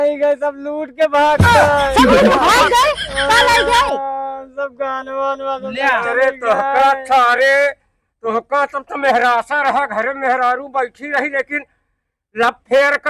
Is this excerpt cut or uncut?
uncut